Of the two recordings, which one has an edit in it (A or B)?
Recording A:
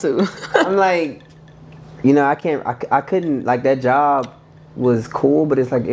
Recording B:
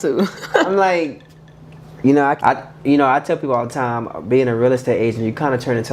B